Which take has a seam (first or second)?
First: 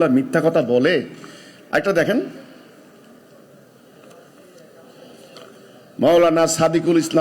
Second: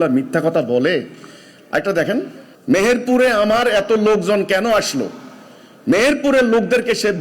second